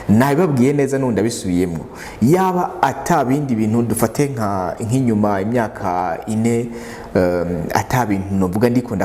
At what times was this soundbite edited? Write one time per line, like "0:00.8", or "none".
none